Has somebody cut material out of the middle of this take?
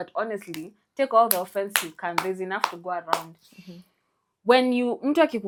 no; 0 cuts

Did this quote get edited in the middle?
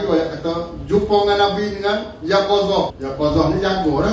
yes; 1 cut; at 3.0 s

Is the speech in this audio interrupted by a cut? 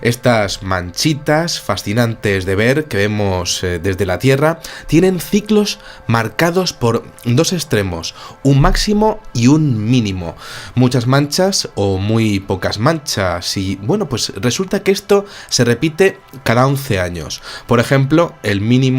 yes; 1 cut; at 7.1 s

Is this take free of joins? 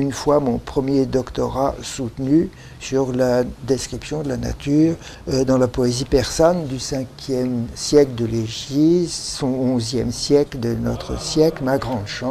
no; 1 cut; at 8.9 s

